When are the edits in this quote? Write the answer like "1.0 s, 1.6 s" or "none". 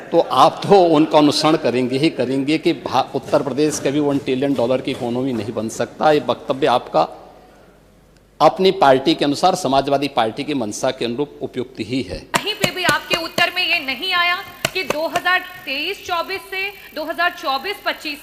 12.3 s